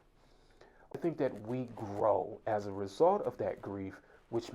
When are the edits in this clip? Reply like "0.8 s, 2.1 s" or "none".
0.9 s